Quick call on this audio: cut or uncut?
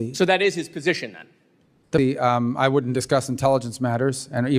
cut